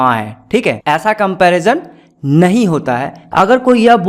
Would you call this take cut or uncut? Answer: cut